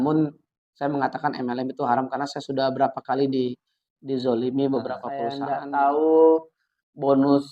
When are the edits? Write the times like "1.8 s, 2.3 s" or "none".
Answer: 5.4 s